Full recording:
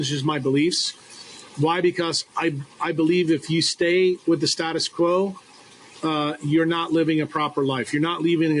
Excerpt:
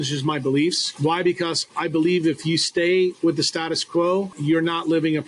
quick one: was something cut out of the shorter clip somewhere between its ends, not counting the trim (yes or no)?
yes